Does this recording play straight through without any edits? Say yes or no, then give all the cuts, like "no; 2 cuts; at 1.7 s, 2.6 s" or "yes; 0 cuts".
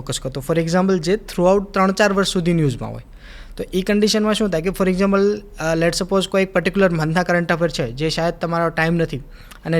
yes; 0 cuts